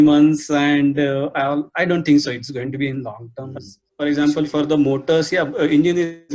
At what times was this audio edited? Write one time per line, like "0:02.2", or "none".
0:04.0